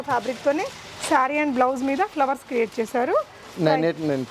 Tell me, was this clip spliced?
no; 0 cuts

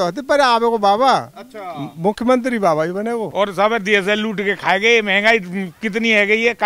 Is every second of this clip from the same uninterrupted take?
no; 1 cut; at 3.3 s

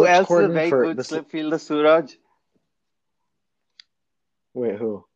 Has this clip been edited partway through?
no; 0 cuts

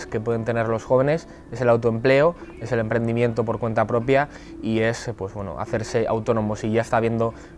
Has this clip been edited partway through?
no; 0 cuts

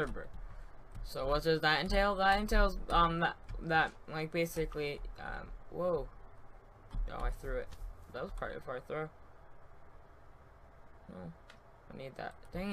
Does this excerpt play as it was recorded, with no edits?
no; 1 cut; at 6.8 s

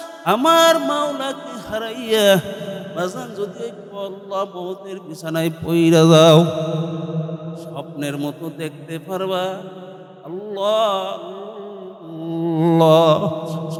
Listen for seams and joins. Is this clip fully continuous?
yes; 0 cuts

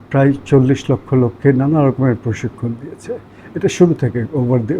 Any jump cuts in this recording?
no; 0 cuts

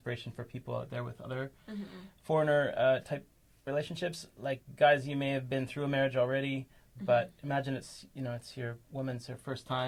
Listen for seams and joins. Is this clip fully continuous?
yes; 0 cuts

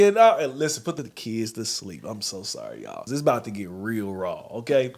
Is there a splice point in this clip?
yes; 2 cuts; at 1.0 s, 3.0 s

